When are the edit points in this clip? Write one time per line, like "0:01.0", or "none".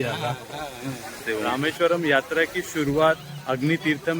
0:01.2